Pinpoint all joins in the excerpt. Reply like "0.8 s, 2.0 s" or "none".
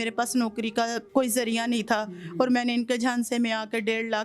1.0 s